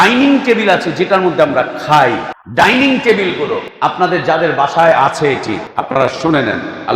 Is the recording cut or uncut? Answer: cut